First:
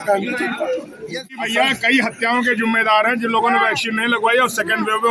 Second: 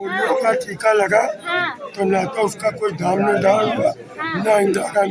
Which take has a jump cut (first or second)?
first